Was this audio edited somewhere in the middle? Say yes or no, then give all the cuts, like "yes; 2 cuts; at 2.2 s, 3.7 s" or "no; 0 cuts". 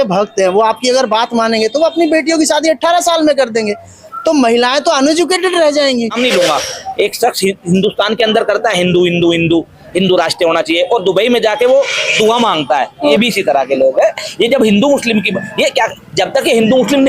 yes; 2 cuts; at 6.1 s, 13.1 s